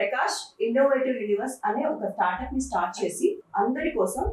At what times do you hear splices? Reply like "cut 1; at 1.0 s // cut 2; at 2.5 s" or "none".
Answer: cut 1; at 3.4 s